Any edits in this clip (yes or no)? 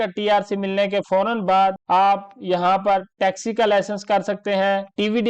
yes